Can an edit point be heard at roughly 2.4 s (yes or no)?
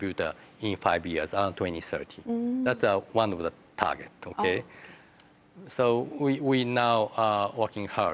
no